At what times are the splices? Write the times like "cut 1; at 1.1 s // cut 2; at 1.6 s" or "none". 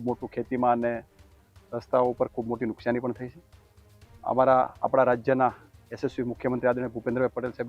none